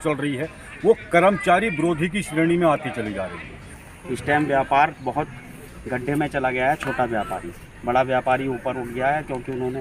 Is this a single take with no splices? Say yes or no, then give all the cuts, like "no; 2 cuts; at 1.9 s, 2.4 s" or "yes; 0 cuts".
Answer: no; 1 cut; at 3.8 s